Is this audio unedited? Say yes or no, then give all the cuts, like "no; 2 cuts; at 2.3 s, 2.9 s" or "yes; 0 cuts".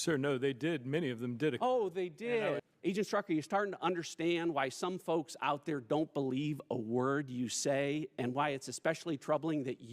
no; 1 cut; at 2.6 s